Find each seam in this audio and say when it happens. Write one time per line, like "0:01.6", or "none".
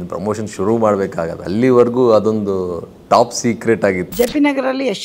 0:01.4
0:04.1